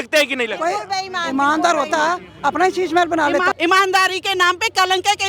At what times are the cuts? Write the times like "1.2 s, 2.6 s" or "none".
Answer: 3.5 s